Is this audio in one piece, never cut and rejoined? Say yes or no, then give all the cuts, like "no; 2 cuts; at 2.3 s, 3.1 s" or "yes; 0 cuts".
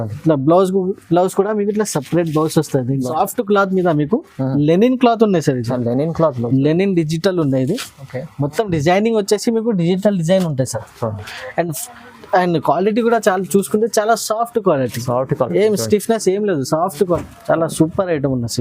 no; 2 cuts; at 3.0 s, 17.2 s